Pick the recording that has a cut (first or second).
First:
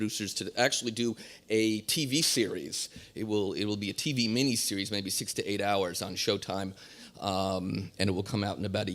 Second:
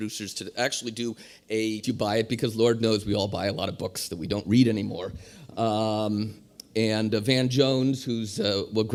first